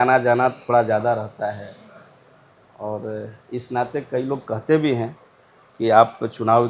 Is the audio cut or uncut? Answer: uncut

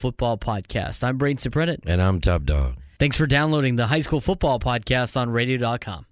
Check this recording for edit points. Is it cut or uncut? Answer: uncut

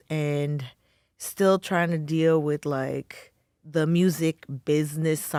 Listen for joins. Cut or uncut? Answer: uncut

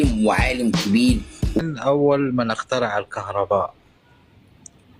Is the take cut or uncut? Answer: cut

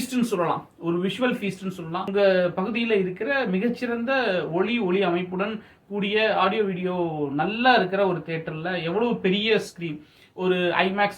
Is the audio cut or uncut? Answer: cut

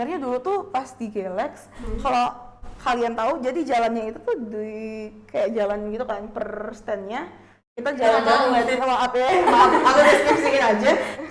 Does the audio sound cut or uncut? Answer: uncut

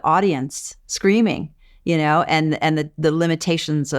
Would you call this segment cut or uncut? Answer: uncut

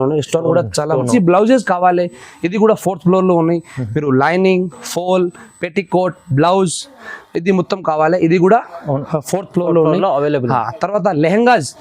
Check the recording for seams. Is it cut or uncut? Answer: cut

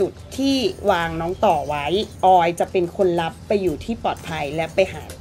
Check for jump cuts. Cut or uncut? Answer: uncut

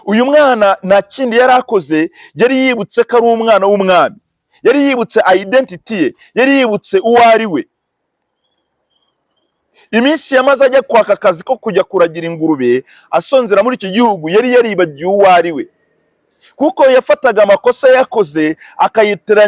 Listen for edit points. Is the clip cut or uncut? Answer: uncut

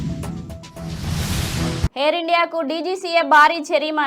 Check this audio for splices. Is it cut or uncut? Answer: cut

